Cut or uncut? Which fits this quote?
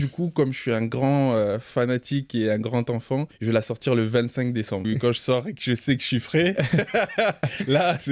cut